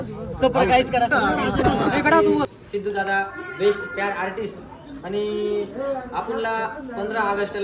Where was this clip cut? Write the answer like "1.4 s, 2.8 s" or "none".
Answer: 2.2 s